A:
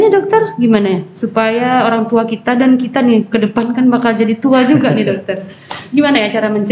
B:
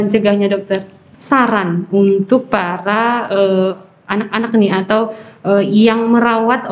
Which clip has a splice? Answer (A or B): B